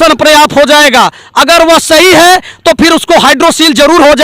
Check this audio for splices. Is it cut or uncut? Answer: uncut